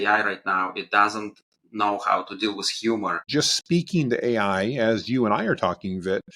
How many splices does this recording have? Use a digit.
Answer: 1